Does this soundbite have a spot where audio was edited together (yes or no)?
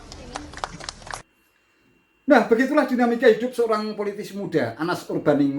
yes